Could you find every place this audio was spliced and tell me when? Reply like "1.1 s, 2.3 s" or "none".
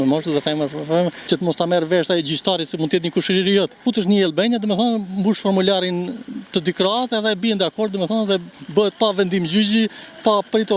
1.2 s, 3.8 s